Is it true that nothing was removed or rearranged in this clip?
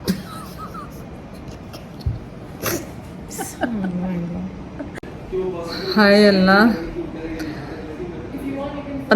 yes; 0 cuts

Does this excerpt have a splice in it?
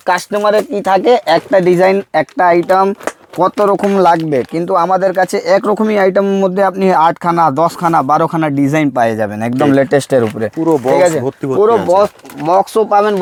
no; 0 cuts

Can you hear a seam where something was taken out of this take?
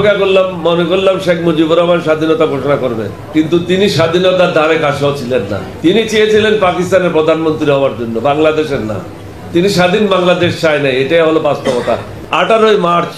yes; 3 cuts; at 3.2 s, 5.7 s, 12.1 s

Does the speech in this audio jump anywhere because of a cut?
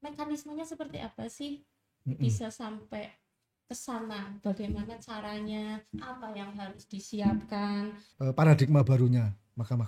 yes; 1 cut; at 8.0 s

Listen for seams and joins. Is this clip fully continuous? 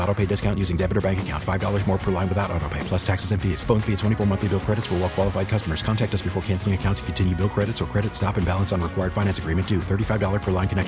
yes; 0 cuts

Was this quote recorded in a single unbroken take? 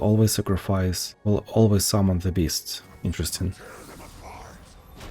no; 1 cut; at 1.1 s

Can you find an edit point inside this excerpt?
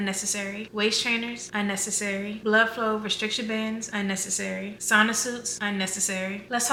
no; 0 cuts

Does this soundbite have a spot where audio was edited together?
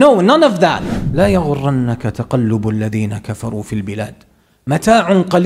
yes; 1 cut; at 0.9 s

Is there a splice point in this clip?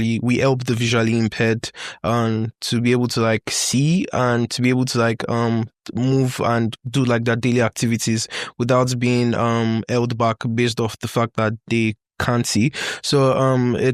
no; 0 cuts

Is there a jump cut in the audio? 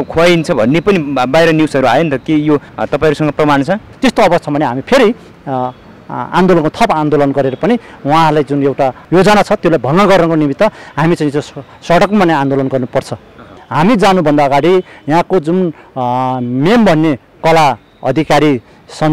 yes; 2 cuts; at 3.9 s, 13.6 s

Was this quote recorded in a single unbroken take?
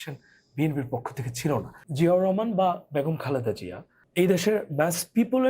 no; 1 cut; at 1.8 s

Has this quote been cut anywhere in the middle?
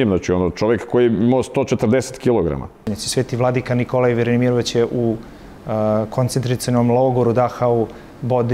yes; 1 cut; at 2.9 s

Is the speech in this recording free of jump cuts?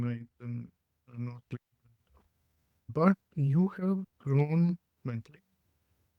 no; 1 cut; at 4.1 s

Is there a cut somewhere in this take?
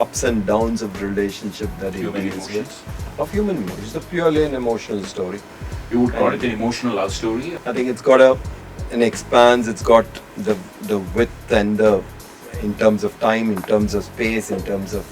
yes; 1 cut; at 7.5 s

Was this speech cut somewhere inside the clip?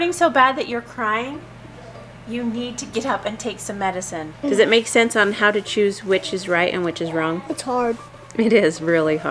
yes; 2 cuts; at 4.4 s, 7.5 s

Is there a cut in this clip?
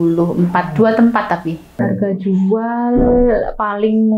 yes; 1 cut; at 1.6 s

